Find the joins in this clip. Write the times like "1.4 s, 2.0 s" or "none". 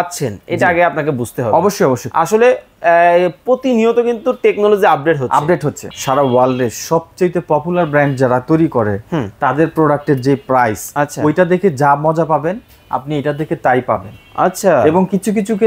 5.8 s